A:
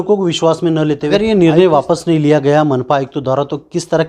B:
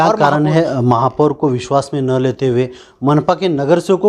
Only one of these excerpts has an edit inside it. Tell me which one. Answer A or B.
A